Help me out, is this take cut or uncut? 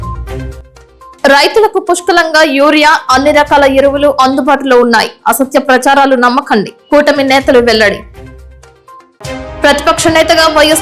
cut